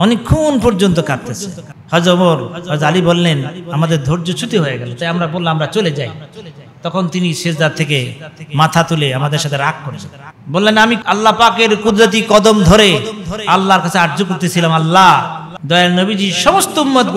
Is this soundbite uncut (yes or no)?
no